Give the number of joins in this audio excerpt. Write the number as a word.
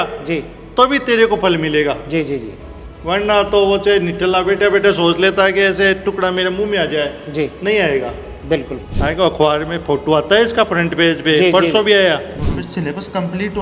two